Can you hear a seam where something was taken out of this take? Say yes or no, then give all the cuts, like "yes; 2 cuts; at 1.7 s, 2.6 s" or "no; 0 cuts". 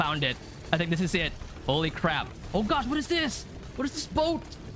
yes; 1 cut; at 2.3 s